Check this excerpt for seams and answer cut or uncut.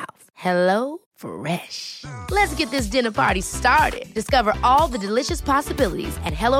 uncut